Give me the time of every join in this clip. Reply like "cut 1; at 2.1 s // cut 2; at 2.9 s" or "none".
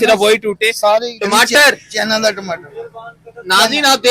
cut 1; at 1.1 s